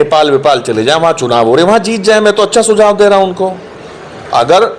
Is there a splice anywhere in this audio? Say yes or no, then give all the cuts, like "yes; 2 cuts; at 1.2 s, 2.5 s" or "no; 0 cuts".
no; 0 cuts